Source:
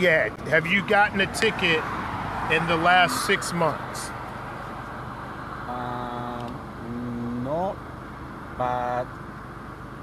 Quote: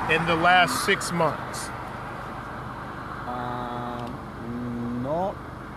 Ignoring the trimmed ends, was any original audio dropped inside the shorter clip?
no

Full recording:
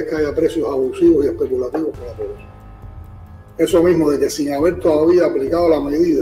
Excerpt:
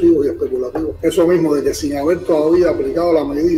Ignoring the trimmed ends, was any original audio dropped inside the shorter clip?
yes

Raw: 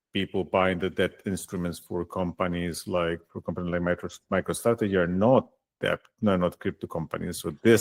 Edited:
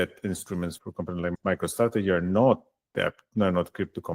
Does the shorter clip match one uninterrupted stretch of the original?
no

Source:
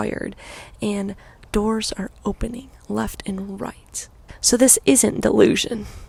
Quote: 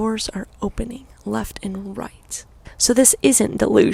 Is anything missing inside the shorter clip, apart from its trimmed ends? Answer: no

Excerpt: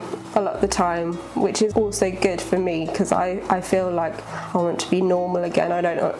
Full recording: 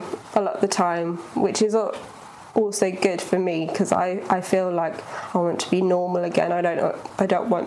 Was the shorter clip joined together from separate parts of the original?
yes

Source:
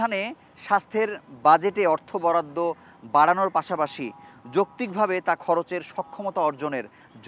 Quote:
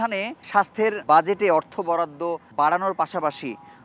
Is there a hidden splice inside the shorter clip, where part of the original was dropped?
yes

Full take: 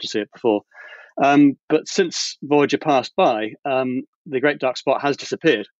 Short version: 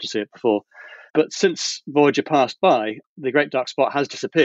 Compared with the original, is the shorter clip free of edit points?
no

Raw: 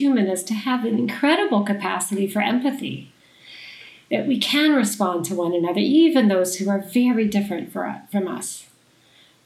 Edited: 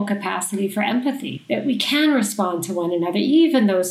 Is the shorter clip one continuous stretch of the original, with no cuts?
no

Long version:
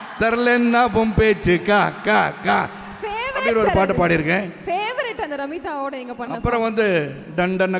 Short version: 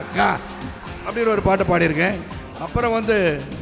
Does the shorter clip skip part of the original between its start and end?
yes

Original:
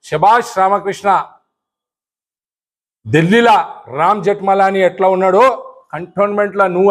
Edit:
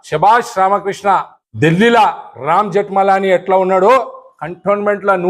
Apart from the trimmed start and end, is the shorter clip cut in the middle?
yes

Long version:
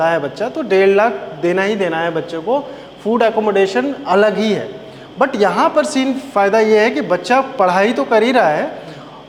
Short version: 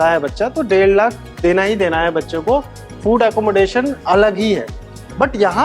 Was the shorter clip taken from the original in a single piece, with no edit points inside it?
yes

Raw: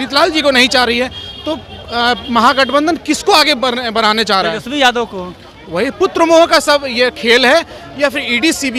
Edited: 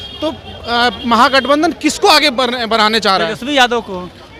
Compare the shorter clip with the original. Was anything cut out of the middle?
no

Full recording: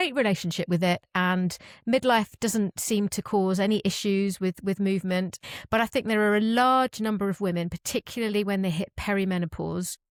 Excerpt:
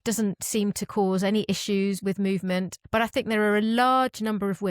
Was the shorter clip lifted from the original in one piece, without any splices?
no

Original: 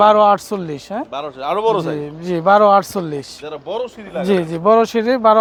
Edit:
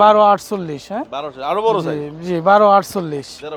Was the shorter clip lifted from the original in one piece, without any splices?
yes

